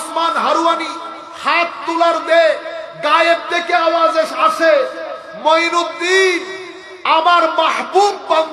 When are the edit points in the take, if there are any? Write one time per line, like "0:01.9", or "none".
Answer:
none